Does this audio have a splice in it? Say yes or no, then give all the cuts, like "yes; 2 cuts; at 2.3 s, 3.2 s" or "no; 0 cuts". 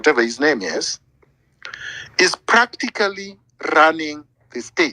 no; 0 cuts